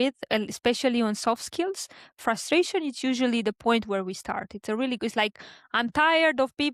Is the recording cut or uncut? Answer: uncut